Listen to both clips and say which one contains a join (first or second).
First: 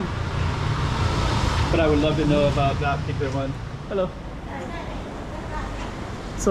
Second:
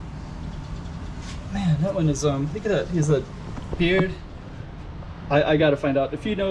first